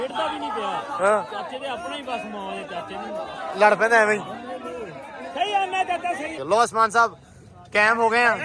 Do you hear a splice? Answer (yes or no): yes